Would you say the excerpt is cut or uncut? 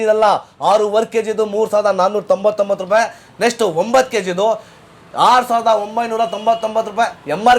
uncut